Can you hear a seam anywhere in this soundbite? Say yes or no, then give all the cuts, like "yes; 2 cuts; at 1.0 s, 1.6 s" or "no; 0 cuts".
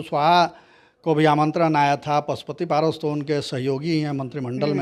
no; 0 cuts